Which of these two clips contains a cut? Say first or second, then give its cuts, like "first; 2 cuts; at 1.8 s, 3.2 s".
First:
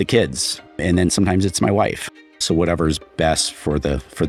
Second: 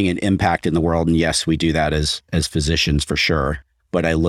first; 2 cuts; at 0.8 s, 2.4 s